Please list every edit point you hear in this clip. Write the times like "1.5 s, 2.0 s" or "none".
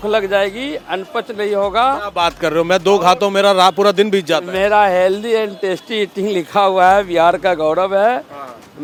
none